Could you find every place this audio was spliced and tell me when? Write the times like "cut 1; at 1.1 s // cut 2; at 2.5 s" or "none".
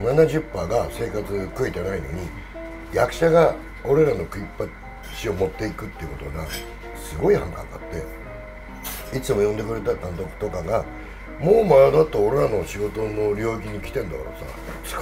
none